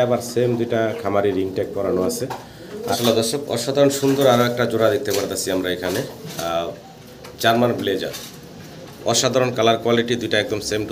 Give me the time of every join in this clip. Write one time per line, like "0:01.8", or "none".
0:02.9

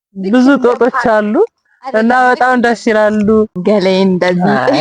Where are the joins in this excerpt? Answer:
0:03.6

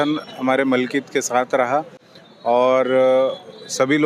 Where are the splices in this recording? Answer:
none

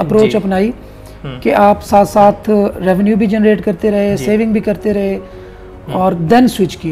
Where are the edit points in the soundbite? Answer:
none

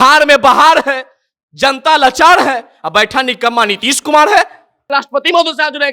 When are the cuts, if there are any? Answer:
0:04.9

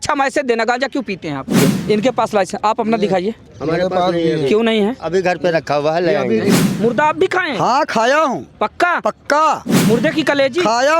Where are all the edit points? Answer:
0:01.6
0:06.6
0:09.8

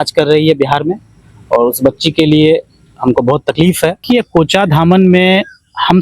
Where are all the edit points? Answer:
0:04.0

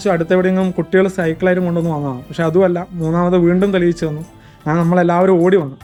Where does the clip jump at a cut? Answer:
none

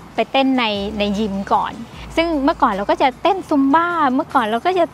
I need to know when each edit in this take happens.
0:02.0

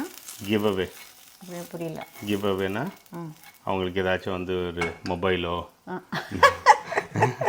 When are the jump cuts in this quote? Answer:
none

